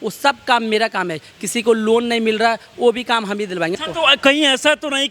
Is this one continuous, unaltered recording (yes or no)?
no